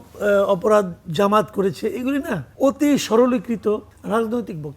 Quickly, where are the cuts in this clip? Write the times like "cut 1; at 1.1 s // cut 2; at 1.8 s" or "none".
cut 1; at 2.4 s // cut 2; at 3.9 s